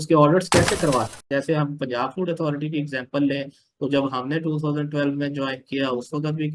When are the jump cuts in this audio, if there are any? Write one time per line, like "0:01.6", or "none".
0:01.2